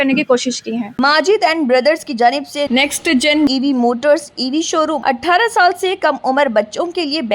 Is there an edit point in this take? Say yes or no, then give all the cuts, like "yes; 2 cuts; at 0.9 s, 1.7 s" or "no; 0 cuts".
yes; 2 cuts; at 0.9 s, 5.0 s